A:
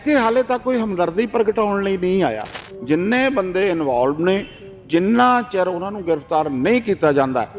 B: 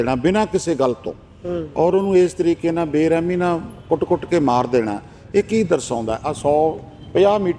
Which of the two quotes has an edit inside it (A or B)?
A